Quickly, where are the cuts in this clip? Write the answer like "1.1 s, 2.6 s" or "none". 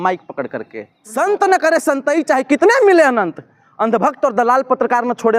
1.0 s